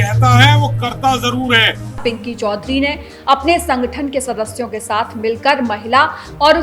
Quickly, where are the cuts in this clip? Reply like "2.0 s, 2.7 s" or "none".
2.0 s